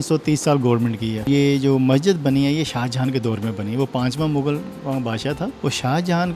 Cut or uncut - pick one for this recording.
cut